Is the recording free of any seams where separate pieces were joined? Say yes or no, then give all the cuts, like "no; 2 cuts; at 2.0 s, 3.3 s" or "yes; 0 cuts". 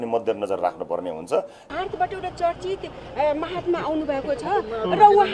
no; 1 cut; at 1.6 s